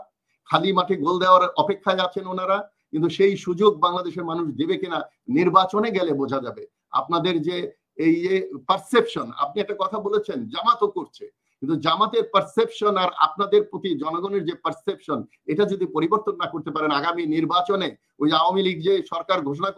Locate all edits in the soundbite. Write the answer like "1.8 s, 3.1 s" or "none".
none